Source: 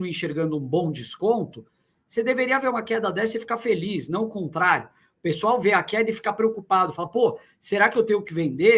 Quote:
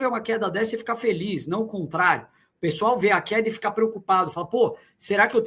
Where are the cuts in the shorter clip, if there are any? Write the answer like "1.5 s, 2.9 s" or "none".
none